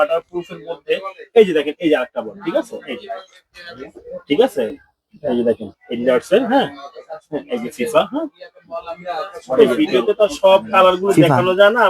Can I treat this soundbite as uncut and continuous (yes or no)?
no